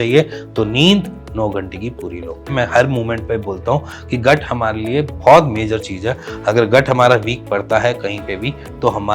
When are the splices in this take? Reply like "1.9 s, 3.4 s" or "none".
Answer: 2.5 s